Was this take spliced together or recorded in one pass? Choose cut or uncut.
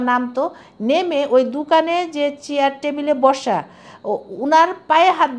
uncut